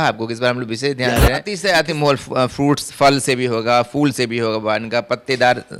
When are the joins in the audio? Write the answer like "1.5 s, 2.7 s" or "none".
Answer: 1.5 s